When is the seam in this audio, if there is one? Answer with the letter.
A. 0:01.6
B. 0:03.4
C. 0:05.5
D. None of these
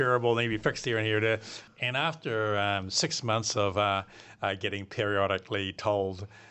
A